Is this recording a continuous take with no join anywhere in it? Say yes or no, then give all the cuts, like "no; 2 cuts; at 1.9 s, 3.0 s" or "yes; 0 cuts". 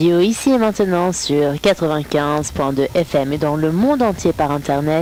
yes; 0 cuts